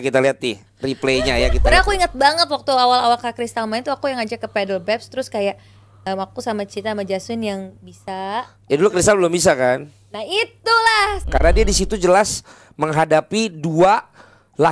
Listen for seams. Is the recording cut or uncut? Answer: cut